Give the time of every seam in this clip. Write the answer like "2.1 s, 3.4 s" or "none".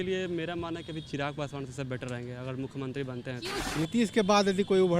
3.5 s